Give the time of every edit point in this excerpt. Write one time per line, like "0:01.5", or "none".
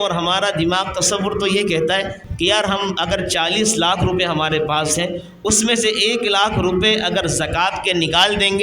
0:02.2